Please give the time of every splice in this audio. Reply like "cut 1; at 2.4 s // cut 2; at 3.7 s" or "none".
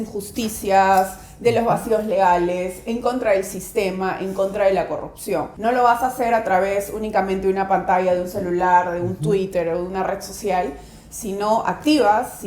cut 1; at 5.5 s